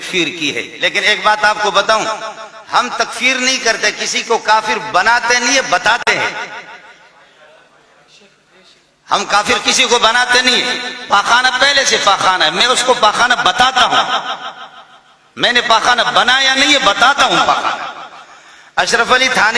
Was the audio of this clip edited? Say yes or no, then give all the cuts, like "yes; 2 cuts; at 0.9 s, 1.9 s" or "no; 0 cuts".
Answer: no; 0 cuts